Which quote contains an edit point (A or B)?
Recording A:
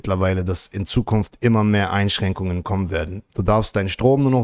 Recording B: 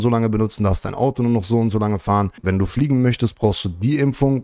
B